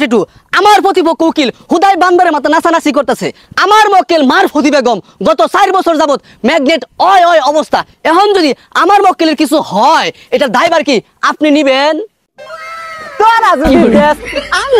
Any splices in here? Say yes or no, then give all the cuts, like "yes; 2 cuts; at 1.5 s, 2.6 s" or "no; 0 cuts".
no; 0 cuts